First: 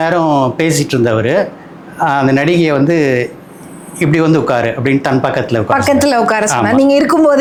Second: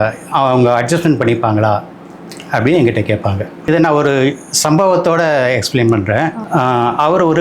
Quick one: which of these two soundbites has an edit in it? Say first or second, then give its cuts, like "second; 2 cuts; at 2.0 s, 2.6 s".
second; 1 cut; at 3.7 s